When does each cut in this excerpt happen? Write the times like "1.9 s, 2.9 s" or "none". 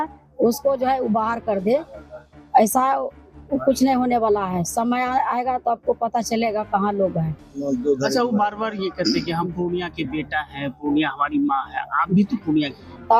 none